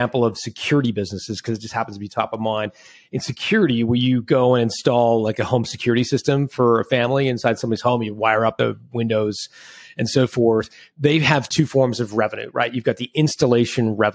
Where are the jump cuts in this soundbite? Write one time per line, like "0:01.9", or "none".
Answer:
none